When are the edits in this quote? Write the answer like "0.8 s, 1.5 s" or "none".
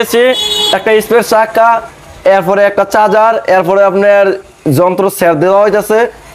none